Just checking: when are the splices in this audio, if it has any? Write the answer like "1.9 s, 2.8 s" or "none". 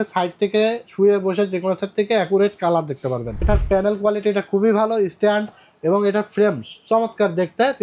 3.4 s